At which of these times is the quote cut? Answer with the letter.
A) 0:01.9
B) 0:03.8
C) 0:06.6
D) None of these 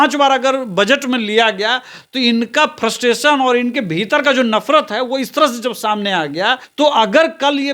C